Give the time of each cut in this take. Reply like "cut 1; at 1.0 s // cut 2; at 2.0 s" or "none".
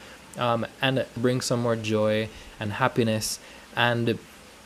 cut 1; at 1.1 s